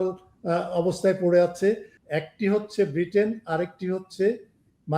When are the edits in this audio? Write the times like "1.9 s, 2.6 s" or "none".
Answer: 1.9 s